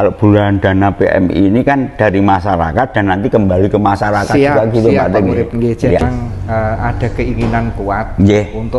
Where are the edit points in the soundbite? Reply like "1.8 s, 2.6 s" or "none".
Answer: 6.0 s